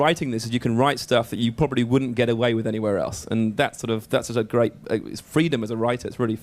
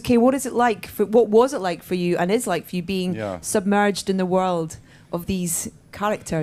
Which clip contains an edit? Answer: first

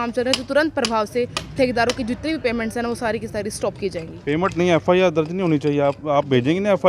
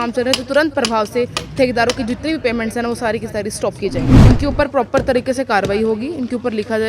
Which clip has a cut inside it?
second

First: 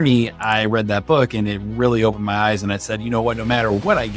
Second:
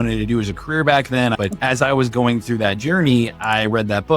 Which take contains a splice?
second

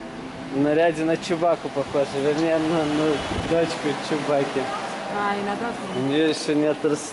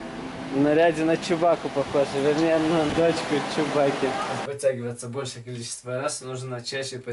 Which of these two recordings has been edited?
second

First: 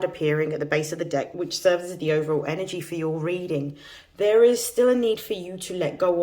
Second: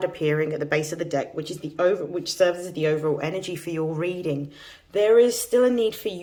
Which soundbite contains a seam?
first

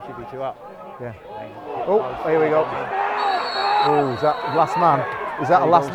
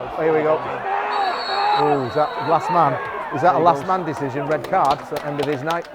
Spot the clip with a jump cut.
second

